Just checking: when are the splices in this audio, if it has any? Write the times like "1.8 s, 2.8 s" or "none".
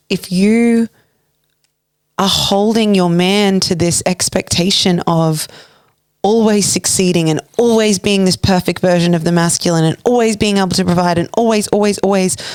none